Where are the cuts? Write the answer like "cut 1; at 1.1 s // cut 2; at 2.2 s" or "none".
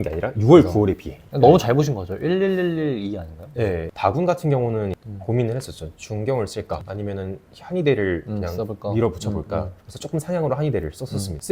cut 1; at 3.9 s